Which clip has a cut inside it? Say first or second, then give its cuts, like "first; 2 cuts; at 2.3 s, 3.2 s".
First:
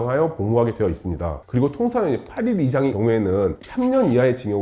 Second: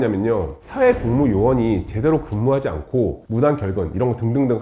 first; 2 cuts; at 1.3 s, 3.2 s